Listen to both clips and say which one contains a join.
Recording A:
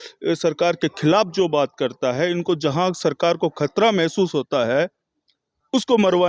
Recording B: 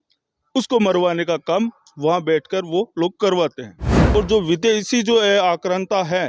B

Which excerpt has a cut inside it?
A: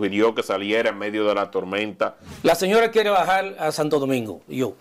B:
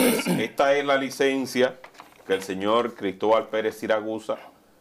A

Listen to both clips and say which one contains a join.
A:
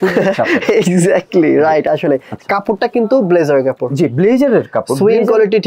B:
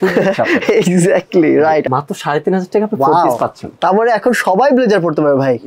B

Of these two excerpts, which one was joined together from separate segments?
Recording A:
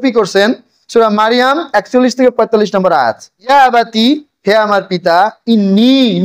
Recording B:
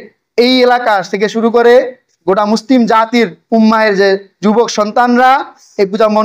A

